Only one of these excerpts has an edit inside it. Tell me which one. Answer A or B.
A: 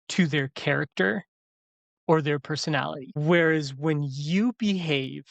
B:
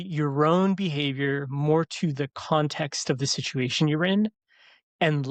A